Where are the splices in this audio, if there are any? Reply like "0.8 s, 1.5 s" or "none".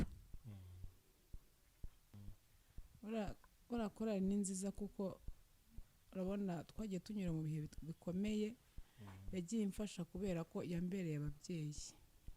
2.1 s